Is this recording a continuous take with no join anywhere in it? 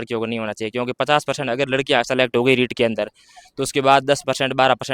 yes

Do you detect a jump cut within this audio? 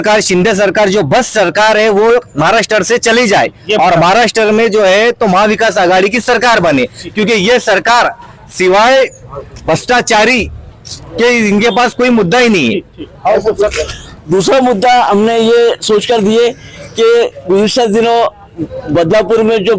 no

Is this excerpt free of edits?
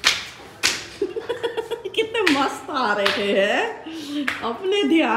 yes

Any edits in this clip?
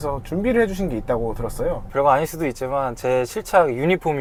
no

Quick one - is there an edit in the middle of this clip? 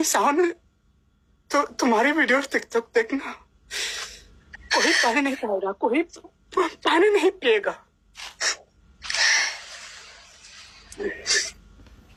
no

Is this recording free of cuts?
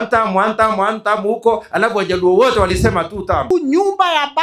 no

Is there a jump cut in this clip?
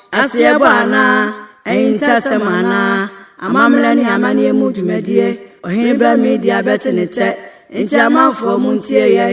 no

